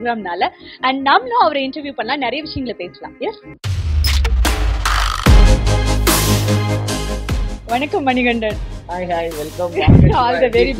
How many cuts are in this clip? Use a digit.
1